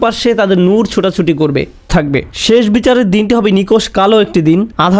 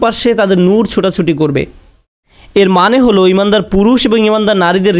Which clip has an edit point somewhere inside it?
first; 1 cut; at 1.9 s

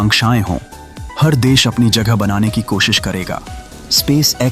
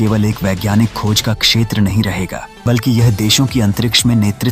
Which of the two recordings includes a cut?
second; 1 cut; at 2.5 s

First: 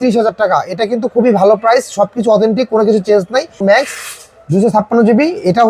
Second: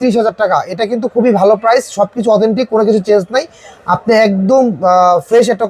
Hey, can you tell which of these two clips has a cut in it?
first; 1 cut; at 3.6 s

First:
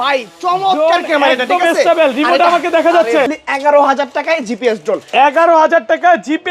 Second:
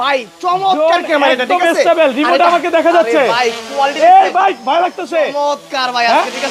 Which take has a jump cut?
first; 1 cut; at 3.3 s

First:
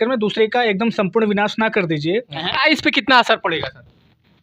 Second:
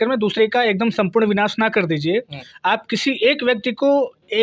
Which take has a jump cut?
first; 1 cut; at 2.4 s

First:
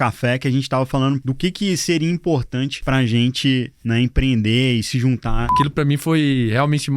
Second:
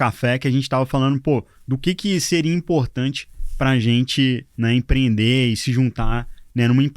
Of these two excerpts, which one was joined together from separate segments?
first; 3 cuts; at 1.2 s, 2.8 s, 5.5 s

